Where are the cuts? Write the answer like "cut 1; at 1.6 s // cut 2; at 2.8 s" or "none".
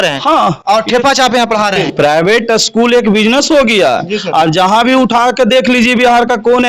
cut 1; at 1.8 s